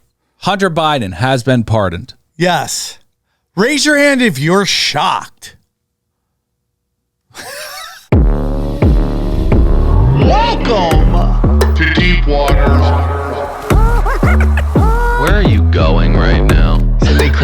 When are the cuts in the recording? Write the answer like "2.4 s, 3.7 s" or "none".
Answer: 7.9 s